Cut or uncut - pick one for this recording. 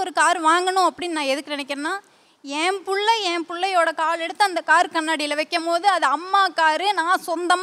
uncut